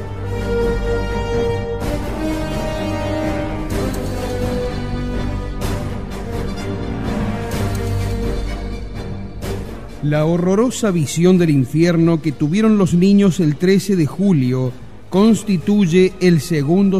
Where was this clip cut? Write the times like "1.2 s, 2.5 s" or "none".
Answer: none